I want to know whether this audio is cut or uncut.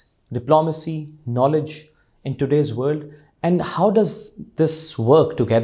uncut